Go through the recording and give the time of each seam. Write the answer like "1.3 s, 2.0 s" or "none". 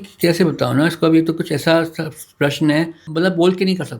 3.0 s